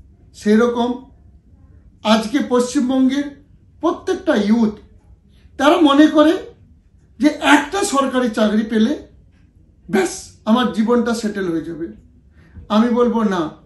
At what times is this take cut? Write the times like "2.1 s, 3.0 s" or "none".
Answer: none